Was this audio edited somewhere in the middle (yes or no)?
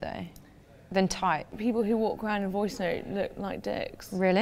yes